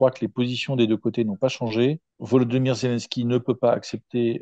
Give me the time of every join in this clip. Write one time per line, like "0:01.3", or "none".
0:02.1